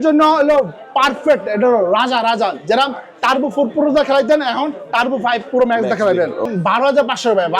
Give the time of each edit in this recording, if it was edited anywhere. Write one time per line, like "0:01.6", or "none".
0:06.4